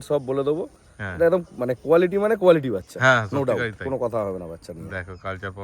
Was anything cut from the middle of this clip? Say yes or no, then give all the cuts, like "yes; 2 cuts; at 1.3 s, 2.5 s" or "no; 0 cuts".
no; 0 cuts